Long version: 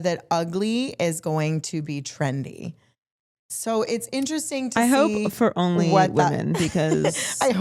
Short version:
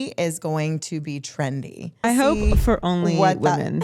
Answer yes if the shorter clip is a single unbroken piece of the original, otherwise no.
no